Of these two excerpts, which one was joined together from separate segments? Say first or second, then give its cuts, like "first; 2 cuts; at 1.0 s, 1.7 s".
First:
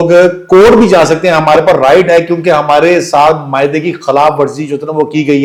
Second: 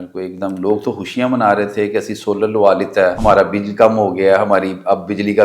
second; 1 cut; at 3.2 s